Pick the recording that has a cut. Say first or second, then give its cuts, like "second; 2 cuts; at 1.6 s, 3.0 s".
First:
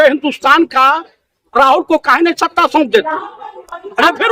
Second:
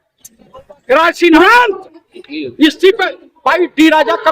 second; 1 cut; at 1.3 s